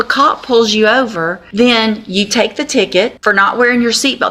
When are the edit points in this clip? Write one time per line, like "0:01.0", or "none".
0:01.4
0:03.2